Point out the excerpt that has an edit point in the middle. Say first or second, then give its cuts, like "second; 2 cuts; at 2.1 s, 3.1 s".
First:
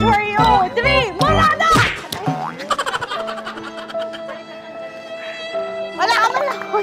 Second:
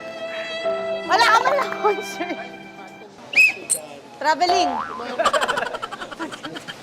second; 1 cut; at 3.2 s